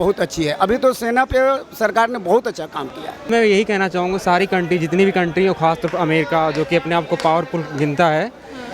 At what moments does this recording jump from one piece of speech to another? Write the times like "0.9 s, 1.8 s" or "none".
3.3 s